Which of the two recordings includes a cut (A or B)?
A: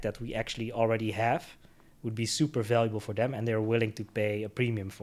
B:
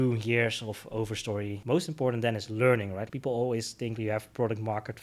B